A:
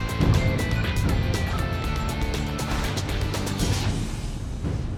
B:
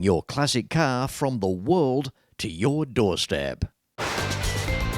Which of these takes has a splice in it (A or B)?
B